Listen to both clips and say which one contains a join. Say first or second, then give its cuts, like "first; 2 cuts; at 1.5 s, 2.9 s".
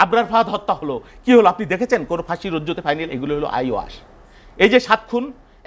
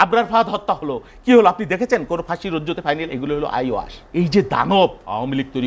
second; 1 cut; at 4.0 s